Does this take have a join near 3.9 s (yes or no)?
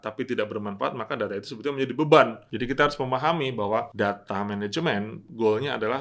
yes